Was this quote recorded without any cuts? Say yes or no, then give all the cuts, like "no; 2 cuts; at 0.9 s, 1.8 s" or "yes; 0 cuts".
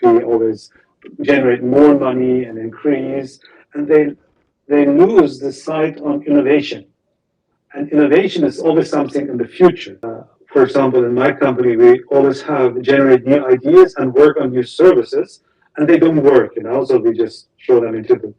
no; 1 cut; at 10.2 s